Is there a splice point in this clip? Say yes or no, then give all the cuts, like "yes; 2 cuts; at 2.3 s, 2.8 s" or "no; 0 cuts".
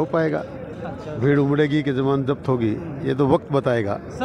no; 0 cuts